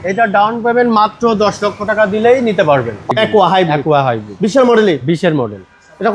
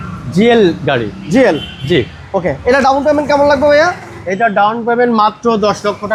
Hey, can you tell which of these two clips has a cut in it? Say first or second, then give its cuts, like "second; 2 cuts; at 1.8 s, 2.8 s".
first; 1 cut; at 3.1 s